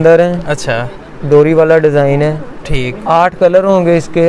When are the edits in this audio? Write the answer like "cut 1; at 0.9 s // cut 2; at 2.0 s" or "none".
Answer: none